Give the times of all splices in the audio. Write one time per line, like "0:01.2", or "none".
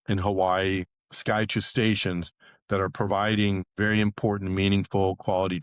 0:03.7